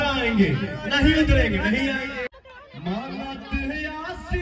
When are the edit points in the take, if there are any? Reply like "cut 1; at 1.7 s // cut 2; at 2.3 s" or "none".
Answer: cut 1; at 2.3 s